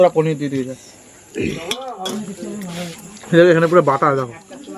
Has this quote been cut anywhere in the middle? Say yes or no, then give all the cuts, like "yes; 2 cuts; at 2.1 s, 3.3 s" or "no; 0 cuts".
yes; 1 cut; at 2.1 s